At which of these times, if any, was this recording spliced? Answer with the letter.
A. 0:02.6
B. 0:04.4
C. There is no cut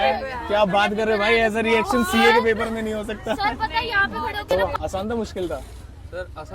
B